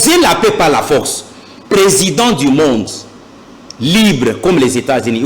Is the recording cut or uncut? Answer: cut